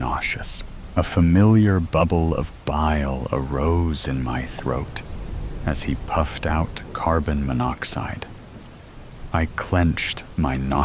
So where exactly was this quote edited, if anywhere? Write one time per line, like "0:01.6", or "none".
0:02.5